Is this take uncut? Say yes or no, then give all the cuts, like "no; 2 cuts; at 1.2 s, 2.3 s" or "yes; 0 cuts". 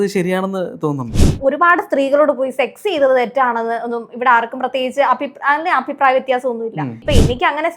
no; 2 cuts; at 1.3 s, 7.0 s